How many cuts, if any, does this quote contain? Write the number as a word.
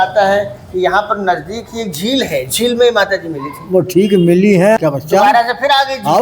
one